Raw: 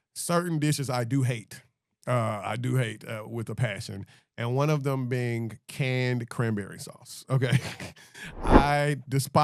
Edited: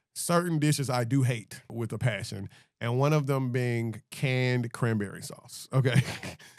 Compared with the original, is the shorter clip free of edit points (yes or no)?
no